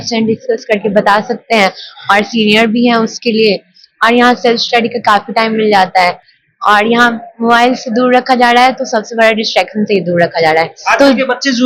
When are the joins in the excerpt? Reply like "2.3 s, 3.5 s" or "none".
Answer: none